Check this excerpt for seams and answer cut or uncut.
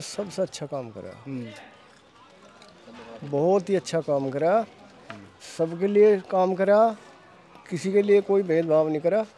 uncut